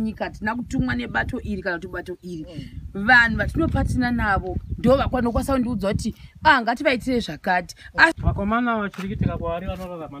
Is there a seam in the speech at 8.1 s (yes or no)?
yes